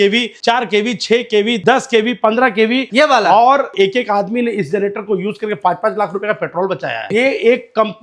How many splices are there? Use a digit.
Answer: 4